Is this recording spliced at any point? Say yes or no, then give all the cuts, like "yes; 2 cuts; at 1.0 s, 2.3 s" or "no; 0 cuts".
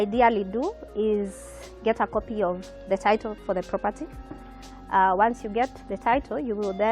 no; 0 cuts